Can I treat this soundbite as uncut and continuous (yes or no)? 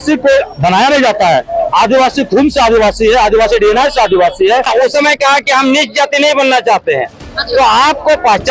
no